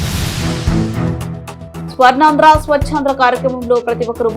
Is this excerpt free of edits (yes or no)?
no